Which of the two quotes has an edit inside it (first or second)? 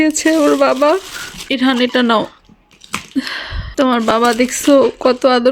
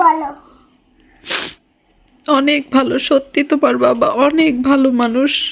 first